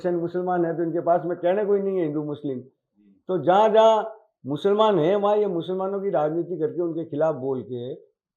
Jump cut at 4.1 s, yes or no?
no